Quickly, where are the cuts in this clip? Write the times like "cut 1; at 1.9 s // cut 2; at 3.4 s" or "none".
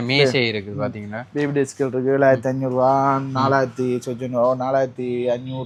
none